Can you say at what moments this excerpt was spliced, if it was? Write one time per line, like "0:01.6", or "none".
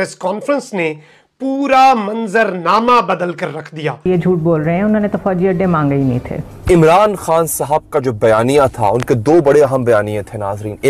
0:04.1
0:06.4